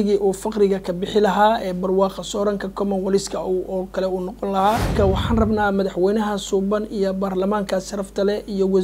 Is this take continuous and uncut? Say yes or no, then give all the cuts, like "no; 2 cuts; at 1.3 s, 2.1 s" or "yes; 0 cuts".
no; 1 cut; at 4.9 s